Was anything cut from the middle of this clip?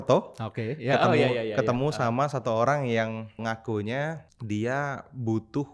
yes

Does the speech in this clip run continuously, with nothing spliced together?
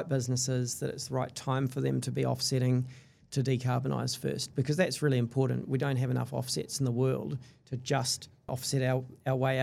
no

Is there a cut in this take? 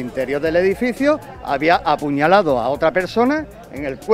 no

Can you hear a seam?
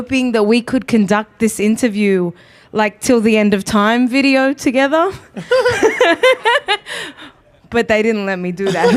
yes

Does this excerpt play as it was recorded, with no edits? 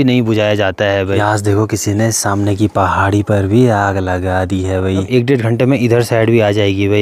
no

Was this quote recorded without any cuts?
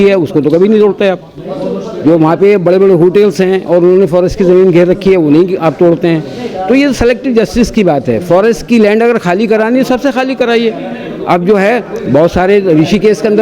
yes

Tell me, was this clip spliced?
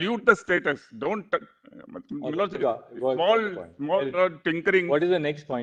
no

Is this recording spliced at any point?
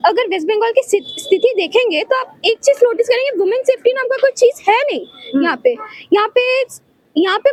no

